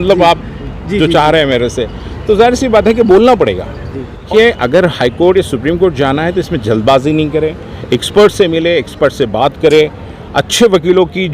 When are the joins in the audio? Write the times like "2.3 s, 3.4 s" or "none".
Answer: 4.3 s